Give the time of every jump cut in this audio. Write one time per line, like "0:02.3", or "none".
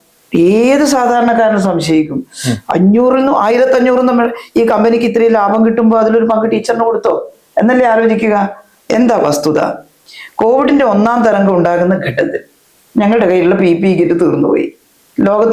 none